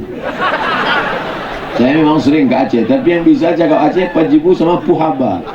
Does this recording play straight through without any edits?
yes; 0 cuts

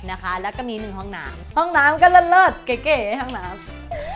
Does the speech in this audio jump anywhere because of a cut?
yes; 1 cut; at 1.3 s

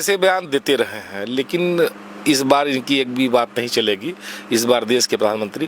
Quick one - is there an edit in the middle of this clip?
no; 0 cuts

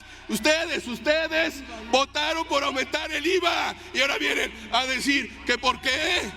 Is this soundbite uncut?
yes; 0 cuts

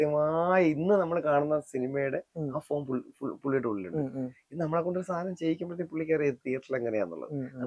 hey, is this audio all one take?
yes; 0 cuts

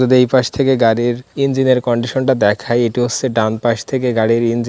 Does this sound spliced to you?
yes; 1 cut; at 1.3 s

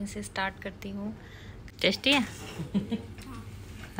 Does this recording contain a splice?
yes; 1 cut; at 1.6 s

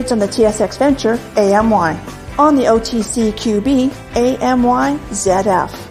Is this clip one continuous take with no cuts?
yes; 0 cuts

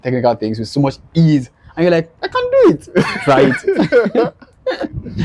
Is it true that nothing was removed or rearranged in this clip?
yes; 0 cuts

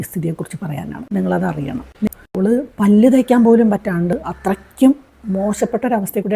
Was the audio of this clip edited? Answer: yes; 1 cut; at 2.1 s

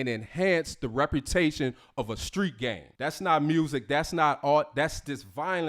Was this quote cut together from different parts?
yes; 1 cut; at 2.9 s

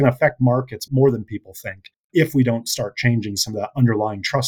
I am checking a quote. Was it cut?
no; 0 cuts

